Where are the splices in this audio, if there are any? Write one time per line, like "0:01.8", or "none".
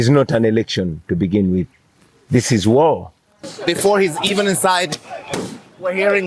0:03.5